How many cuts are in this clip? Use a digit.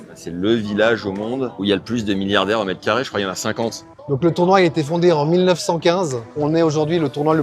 3